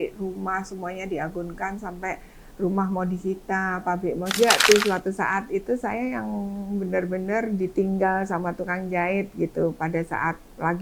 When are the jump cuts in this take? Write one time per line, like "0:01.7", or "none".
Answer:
0:04.4